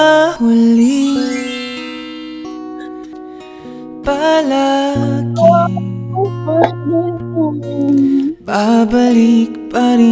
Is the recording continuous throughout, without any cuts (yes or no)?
no